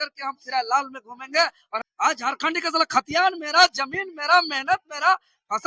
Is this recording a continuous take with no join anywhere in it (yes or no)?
no